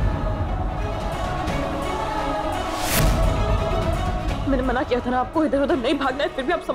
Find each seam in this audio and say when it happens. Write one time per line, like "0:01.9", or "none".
0:01.0